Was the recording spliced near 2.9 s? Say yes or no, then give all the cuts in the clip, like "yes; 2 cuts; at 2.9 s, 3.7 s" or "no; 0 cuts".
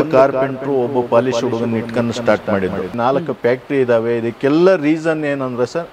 yes; 1 cut; at 2.9 s